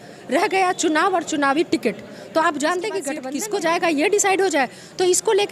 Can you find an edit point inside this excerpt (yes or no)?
yes